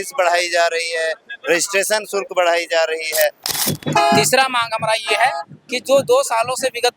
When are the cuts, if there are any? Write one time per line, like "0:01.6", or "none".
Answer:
0:03.5